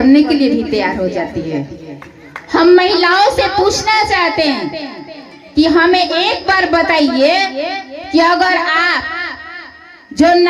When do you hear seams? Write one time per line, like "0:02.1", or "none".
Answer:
none